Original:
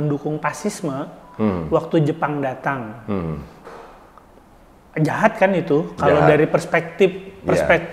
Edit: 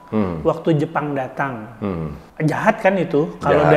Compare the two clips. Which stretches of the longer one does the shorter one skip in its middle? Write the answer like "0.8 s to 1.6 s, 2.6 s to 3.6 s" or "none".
3.5 s to 4.8 s